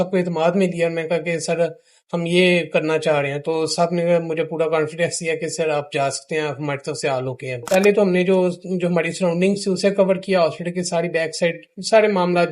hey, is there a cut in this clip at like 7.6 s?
yes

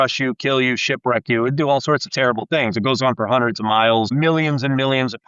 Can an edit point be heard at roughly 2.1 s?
no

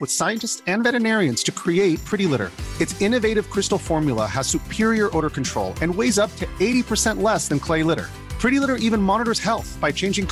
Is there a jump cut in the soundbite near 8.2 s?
no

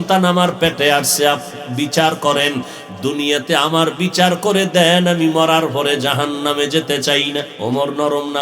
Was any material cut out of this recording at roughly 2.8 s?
no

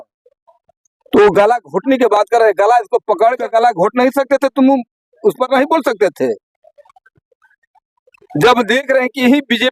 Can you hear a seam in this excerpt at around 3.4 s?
yes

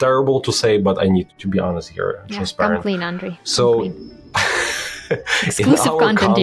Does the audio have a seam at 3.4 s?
no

